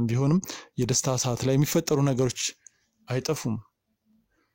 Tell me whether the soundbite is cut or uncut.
uncut